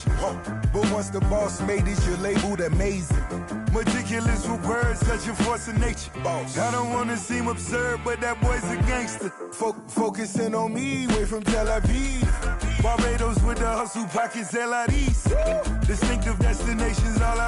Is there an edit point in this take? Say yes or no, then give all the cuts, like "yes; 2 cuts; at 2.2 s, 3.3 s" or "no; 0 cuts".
no; 0 cuts